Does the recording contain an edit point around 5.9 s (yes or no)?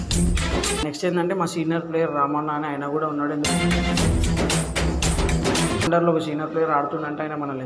yes